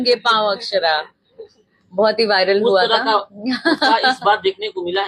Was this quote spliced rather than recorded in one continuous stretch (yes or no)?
no